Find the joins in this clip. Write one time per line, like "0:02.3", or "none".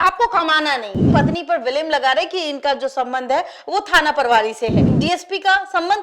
0:01.1
0:04.9